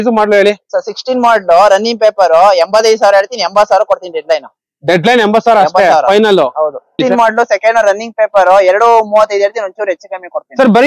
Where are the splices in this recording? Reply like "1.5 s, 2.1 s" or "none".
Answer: 7.0 s